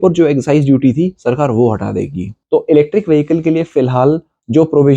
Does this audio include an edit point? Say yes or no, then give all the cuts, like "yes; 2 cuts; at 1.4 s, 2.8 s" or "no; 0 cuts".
yes; 1 cut; at 2.3 s